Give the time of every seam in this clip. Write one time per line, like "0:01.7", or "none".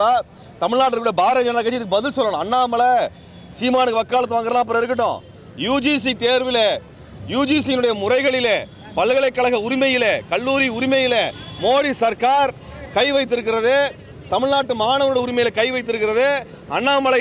none